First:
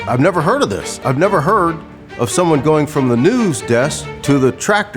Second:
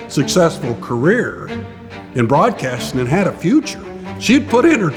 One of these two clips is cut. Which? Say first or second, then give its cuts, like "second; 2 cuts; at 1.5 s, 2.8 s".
first; 1 cut; at 4.1 s